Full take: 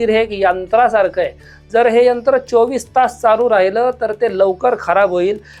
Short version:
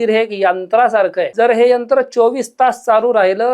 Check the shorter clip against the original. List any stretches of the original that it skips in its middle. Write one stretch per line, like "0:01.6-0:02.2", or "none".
0:01.3-0:01.6